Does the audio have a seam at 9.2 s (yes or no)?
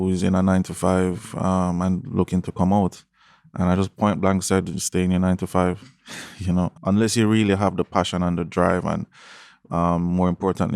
no